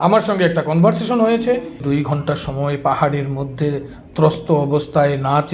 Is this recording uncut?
no; 1 cut; at 1.8 s

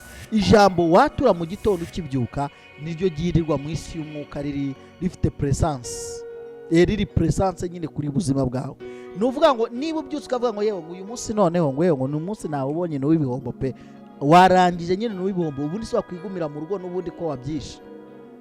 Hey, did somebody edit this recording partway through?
no; 0 cuts

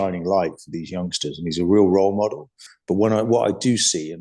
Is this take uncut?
no; 1 cut; at 2.7 s

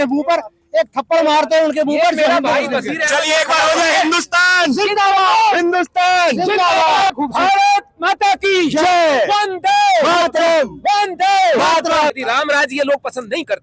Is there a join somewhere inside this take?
yes; 2 cuts; at 7.1 s, 12.2 s

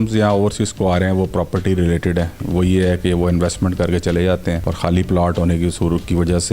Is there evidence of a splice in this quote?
yes; 2 cuts; at 2.4 s, 4.7 s

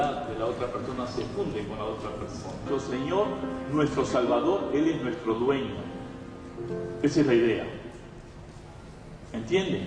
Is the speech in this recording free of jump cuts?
yes; 0 cuts

